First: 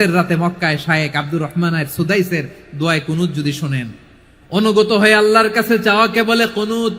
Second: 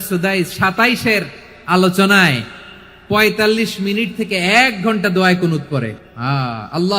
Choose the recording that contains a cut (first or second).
second